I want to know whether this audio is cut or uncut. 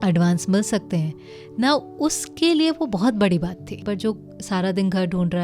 cut